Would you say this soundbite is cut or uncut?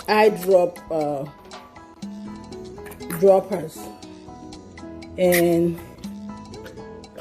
cut